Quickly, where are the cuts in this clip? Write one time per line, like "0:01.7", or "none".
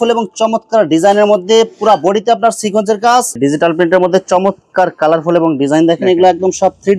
0:03.3